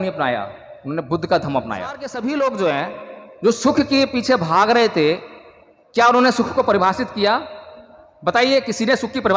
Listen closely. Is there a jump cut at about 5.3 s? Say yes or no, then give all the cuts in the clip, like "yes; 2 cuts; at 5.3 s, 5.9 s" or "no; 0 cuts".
no; 1 cut; at 2.1 s